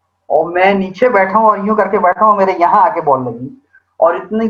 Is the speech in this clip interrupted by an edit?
no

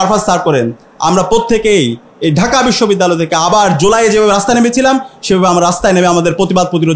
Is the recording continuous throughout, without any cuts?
yes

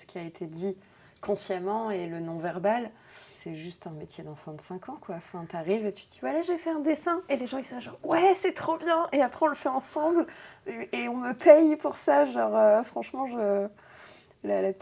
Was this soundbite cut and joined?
no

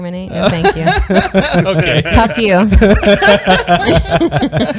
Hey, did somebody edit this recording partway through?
no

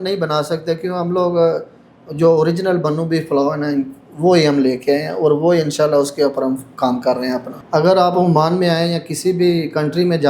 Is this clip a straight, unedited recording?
no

